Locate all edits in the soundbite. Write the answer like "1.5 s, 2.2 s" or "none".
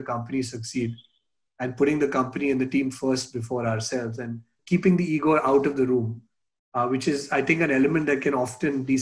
4.5 s